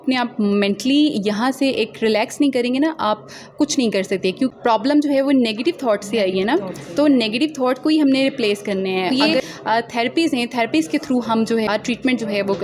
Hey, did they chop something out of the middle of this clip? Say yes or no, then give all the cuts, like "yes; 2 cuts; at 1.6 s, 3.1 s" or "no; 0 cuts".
yes; 3 cuts; at 4.5 s, 9.1 s, 11.7 s